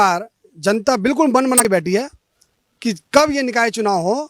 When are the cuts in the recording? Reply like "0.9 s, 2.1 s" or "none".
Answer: 1.6 s

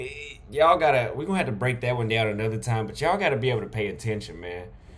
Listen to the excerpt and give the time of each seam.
none

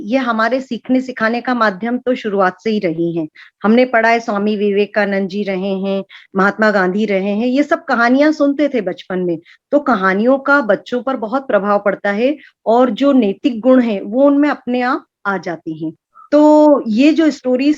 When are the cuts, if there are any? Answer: none

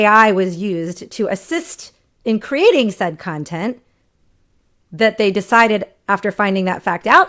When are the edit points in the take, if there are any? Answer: none

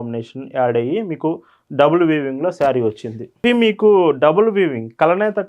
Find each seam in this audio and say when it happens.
3.3 s

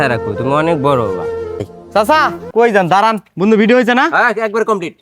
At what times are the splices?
1.8 s

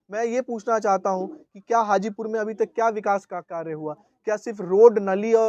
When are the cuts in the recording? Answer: none

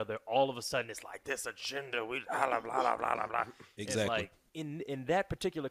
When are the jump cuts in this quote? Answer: 4.4 s

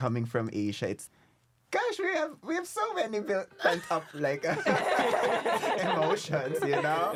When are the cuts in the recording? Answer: none

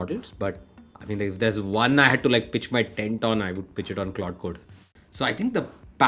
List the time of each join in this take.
4.8 s

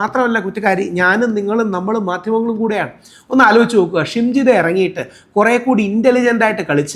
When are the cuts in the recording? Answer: none

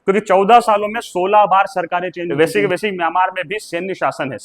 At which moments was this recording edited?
2.2 s

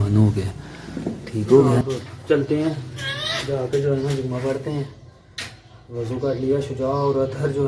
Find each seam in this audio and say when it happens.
1.8 s

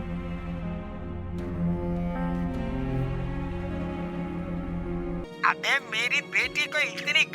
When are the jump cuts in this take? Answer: 5.2 s

